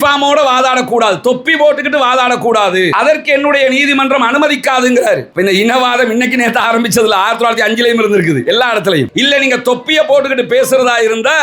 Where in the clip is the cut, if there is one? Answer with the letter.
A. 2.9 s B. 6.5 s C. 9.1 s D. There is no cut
C